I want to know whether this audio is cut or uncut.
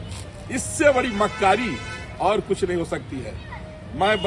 uncut